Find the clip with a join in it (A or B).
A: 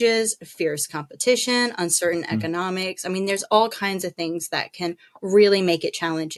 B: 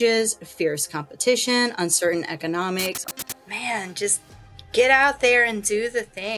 B